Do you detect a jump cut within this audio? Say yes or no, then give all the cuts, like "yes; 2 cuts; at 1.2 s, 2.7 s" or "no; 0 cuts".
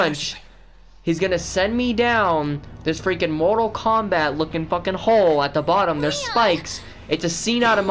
no; 0 cuts